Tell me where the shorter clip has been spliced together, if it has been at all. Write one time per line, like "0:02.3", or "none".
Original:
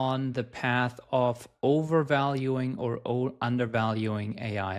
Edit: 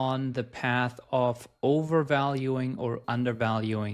0:03.0

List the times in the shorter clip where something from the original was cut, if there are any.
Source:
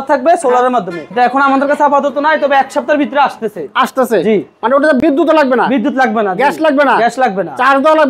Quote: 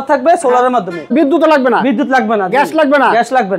0:01.1

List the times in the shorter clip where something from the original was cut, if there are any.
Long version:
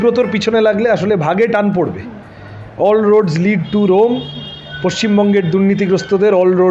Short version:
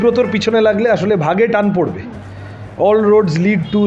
none

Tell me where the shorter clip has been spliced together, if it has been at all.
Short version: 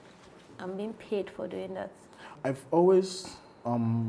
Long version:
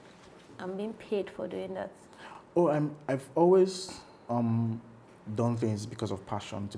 0:02.3

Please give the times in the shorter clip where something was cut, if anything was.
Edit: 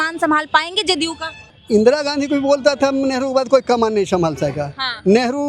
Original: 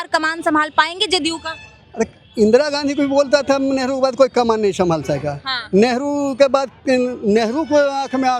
0:01.5

